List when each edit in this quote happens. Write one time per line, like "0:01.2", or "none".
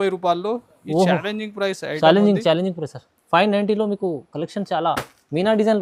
none